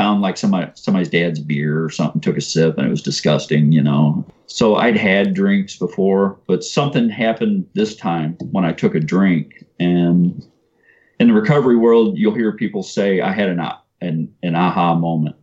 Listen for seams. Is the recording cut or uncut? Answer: uncut